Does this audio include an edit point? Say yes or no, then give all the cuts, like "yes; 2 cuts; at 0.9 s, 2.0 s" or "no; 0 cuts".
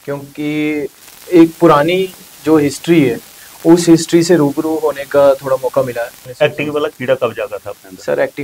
yes; 1 cut; at 6.2 s